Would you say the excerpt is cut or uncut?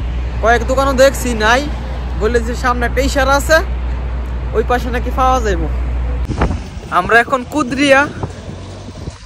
cut